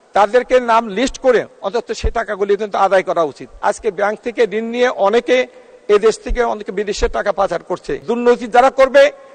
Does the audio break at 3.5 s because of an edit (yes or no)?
yes